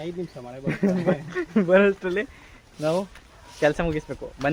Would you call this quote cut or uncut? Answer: uncut